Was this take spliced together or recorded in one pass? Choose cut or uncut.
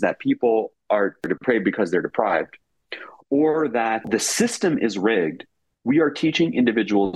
cut